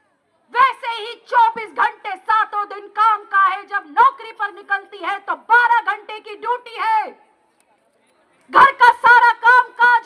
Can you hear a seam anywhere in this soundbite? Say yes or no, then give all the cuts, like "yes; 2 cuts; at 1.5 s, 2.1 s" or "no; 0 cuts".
no; 0 cuts